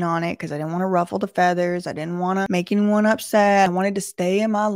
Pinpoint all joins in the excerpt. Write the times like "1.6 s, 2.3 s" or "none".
2.5 s, 3.7 s